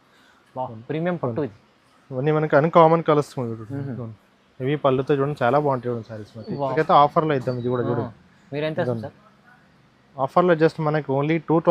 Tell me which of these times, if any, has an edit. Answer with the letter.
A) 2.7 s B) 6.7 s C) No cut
B